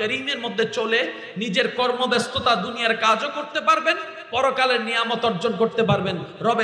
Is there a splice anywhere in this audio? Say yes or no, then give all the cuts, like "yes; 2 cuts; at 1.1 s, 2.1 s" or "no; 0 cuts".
no; 0 cuts